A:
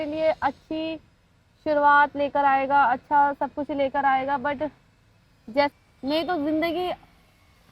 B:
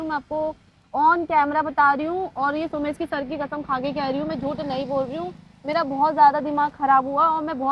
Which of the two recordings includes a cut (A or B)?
A